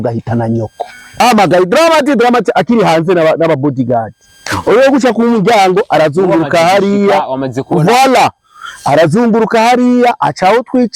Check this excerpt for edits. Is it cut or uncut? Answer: cut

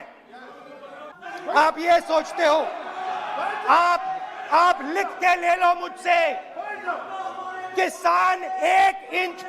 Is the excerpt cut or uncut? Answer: cut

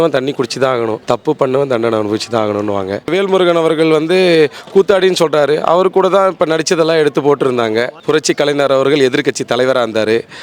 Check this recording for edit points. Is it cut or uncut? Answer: cut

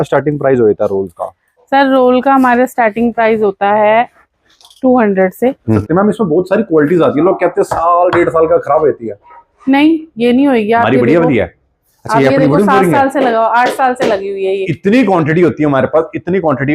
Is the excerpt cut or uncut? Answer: cut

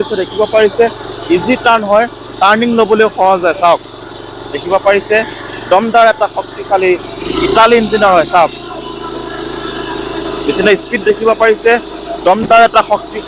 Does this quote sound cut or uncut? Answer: uncut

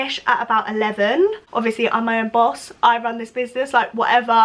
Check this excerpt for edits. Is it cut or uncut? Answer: cut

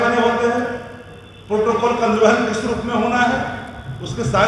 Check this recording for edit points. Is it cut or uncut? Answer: uncut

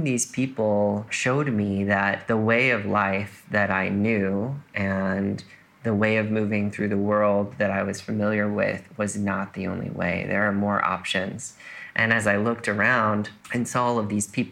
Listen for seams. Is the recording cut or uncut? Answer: cut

